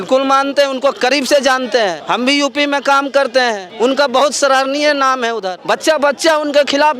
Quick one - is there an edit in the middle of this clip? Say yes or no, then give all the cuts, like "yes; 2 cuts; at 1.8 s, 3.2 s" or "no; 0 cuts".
yes; 3 cuts; at 2.0 s, 3.7 s, 5.6 s